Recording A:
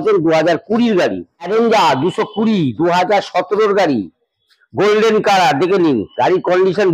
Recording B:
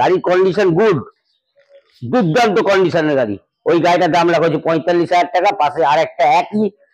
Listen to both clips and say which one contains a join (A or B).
A